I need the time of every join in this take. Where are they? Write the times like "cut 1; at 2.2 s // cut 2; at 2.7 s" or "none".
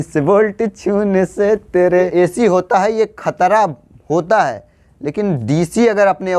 cut 1; at 2.1 s